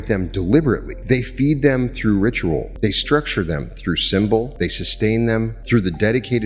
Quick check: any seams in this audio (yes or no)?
yes